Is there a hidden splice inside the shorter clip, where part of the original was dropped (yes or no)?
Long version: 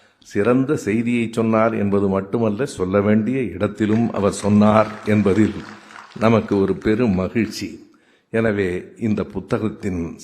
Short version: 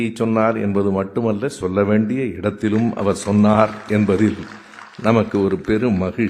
no